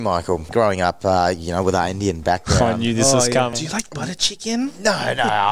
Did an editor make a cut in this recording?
yes; 1 cut; at 3.5 s

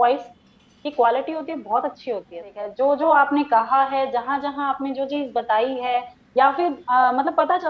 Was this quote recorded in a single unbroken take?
no; 1 cut; at 2.6 s

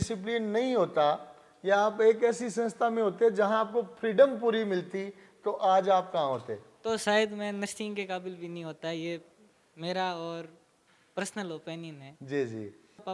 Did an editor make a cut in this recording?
no; 0 cuts

